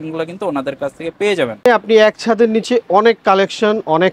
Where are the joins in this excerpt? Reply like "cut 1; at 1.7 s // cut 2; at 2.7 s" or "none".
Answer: cut 1; at 1.6 s